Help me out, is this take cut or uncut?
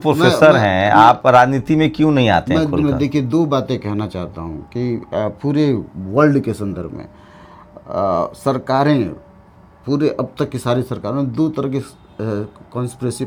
uncut